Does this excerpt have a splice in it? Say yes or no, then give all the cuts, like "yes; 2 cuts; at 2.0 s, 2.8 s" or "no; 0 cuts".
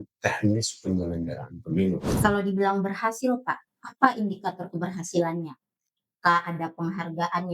yes; 1 cut; at 2.1 s